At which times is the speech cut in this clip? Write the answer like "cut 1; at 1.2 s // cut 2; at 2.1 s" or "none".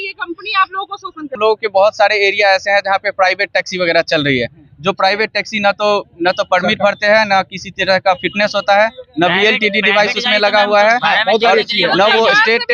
cut 1; at 1.4 s